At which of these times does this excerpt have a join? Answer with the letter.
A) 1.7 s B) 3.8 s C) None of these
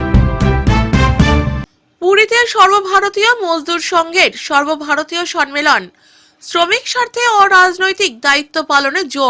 C